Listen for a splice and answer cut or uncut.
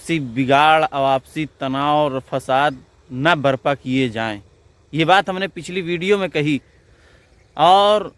uncut